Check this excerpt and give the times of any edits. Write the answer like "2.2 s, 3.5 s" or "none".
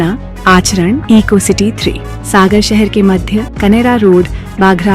none

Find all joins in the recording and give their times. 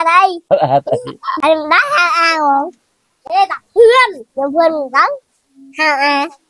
1.3 s

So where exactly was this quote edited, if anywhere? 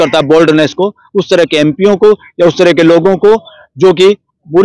none

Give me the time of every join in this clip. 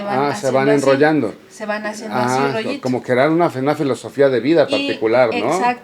none

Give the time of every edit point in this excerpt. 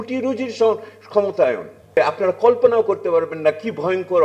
1.9 s

